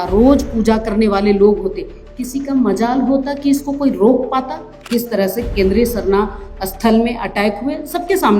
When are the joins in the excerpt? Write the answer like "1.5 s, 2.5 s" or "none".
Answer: 4.8 s